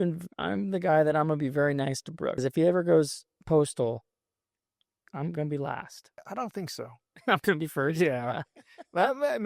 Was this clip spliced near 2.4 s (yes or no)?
yes